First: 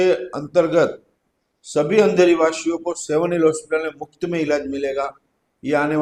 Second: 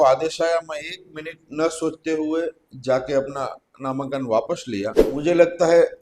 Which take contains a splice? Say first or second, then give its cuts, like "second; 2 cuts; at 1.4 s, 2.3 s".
second; 1 cut; at 5.0 s